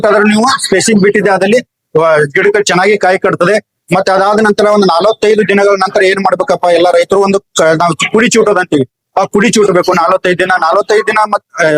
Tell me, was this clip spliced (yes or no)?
no